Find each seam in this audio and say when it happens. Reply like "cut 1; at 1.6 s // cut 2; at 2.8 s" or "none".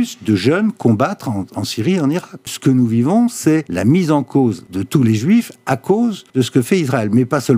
cut 1; at 2.5 s // cut 2; at 3.7 s // cut 3; at 4.7 s // cut 4; at 6.2 s

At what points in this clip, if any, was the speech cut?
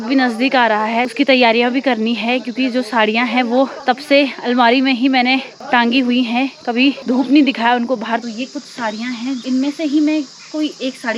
cut 1; at 1.1 s // cut 2; at 3.8 s // cut 3; at 5.5 s // cut 4; at 7.0 s // cut 5; at 8.2 s // cut 6; at 9.4 s

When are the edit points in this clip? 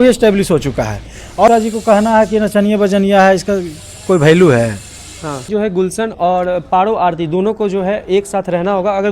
cut 1; at 1.5 s // cut 2; at 5.5 s

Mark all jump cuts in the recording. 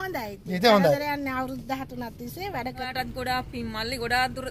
cut 1; at 2.9 s

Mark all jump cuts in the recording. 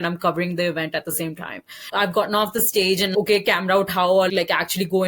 cut 1; at 1.9 s // cut 2; at 3.1 s // cut 3; at 4.3 s

